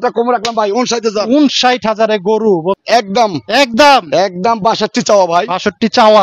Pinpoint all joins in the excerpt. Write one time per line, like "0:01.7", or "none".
0:02.8